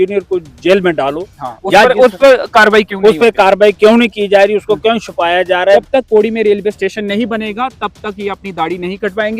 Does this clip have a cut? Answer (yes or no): yes